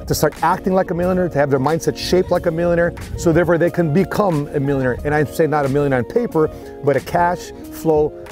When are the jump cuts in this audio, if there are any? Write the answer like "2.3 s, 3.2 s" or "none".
none